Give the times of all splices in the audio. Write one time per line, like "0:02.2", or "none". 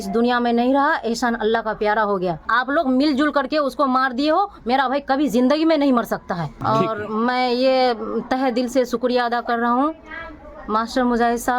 0:02.4
0:06.5

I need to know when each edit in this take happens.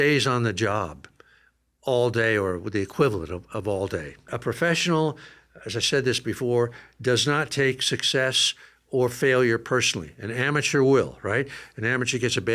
0:04.3

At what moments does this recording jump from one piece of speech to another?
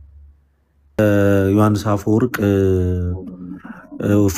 0:01.0

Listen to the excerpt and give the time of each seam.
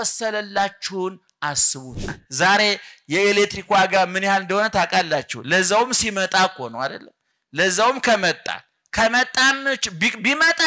0:02.2

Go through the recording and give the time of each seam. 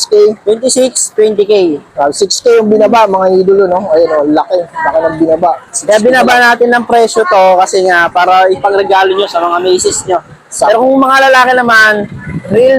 none

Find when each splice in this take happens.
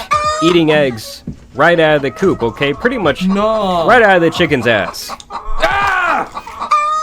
none

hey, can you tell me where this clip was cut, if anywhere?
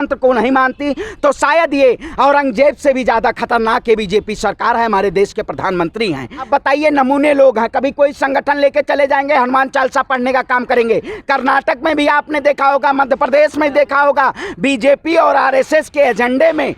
0:06.5

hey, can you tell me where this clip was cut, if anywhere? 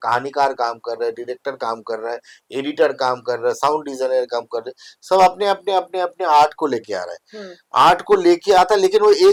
none

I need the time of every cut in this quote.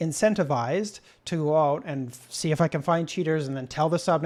none

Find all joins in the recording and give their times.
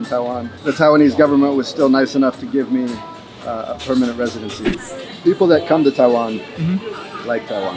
0:04.6

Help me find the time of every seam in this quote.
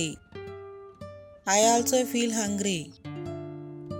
none

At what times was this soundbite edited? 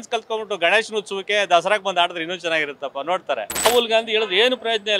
0:03.7

